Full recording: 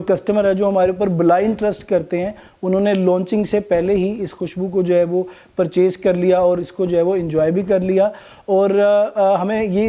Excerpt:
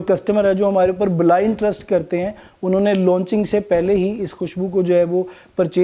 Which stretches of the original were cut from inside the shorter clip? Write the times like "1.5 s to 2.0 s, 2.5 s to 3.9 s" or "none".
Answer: none